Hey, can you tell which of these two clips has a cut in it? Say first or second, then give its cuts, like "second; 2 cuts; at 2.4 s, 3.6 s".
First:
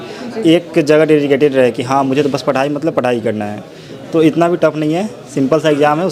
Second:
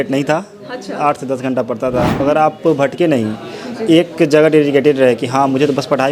second; 1 cut; at 2.1 s